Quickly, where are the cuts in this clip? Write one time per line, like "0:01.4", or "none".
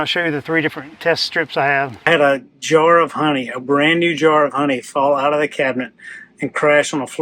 0:02.1